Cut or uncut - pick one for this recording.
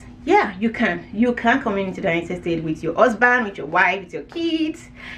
uncut